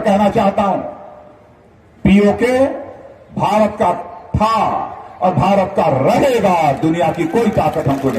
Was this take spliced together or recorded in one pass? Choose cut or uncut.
uncut